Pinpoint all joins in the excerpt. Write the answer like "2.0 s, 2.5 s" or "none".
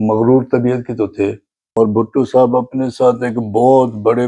1.6 s